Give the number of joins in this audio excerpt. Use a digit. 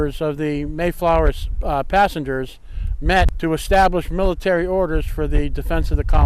1